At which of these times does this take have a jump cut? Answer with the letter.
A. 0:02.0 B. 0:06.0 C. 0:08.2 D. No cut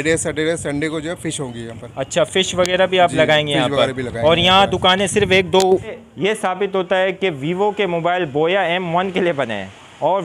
B